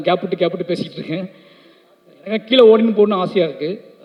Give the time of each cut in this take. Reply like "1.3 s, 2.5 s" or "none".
none